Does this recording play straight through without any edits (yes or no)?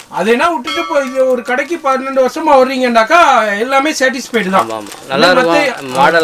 yes